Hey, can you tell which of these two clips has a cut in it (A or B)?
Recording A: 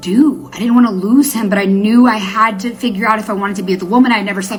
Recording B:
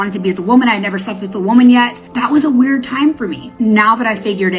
B